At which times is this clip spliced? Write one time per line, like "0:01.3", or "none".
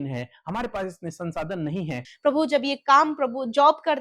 0:02.0